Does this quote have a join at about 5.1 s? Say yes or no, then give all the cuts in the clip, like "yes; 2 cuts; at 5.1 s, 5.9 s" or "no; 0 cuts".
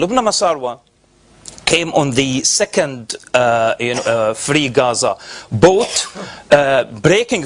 no; 0 cuts